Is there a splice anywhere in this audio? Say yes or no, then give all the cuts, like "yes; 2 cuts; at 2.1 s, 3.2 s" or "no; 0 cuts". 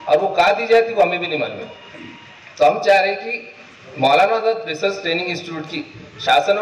no; 0 cuts